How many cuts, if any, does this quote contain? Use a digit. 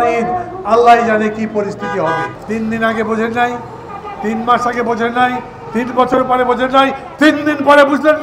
1